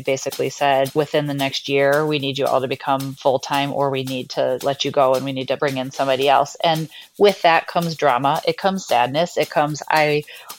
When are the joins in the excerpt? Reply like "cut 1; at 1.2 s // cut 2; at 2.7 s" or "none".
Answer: cut 1; at 0.9 s // cut 2; at 3.1 s // cut 3; at 4.6 s // cut 4; at 5.6 s